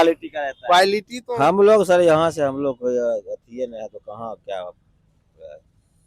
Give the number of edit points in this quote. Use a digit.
1